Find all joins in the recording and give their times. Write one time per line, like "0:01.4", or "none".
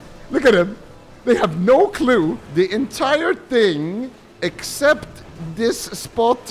0:02.4